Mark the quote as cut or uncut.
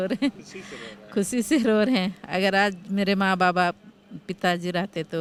uncut